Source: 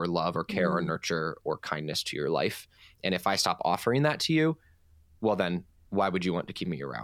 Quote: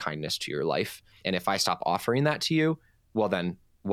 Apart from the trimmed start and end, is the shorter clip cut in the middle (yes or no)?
yes